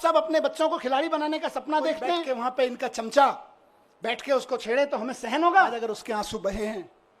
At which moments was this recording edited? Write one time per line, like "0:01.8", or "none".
0:02.2
0:05.8